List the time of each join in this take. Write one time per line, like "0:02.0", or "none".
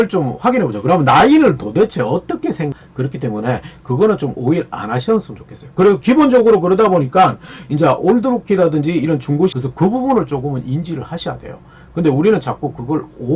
0:02.7
0:09.5